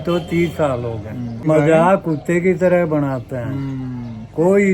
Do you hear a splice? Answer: yes; 1 cut; at 1.4 s

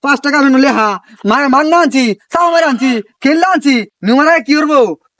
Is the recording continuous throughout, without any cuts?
no; 1 cut; at 3.9 s

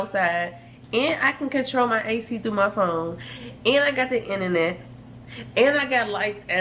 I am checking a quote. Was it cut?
no; 0 cuts

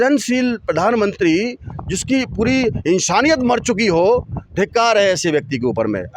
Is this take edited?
no; 0 cuts

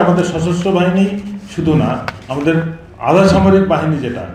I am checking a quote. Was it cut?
no; 0 cuts

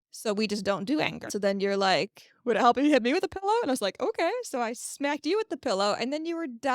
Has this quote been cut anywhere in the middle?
yes; 1 cut; at 1.3 s

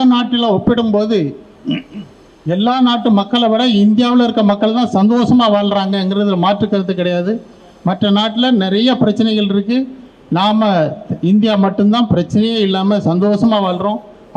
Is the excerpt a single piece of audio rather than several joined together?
yes; 0 cuts

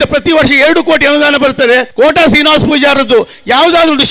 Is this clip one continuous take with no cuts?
no; 1 cut; at 1.9 s

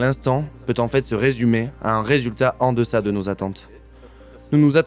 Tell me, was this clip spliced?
no; 0 cuts

